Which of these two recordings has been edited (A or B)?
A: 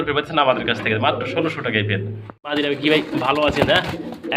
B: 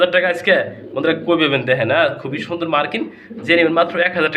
A